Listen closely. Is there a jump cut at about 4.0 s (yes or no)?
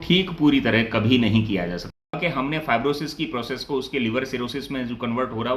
no